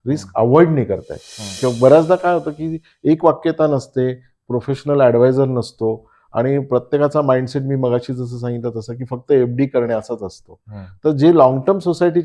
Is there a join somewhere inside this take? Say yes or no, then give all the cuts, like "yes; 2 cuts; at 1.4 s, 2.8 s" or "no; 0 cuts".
yes; 1 cut; at 1.6 s